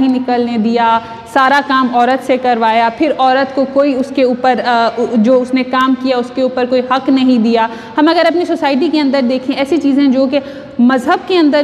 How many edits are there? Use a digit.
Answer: 0